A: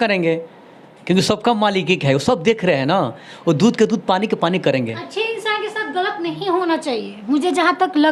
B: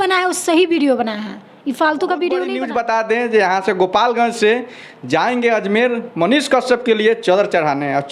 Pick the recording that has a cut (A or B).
B